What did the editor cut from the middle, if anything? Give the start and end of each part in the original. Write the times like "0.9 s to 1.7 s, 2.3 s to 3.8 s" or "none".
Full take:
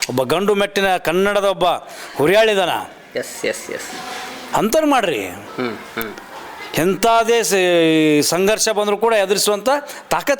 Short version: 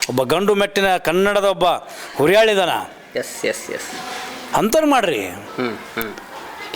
none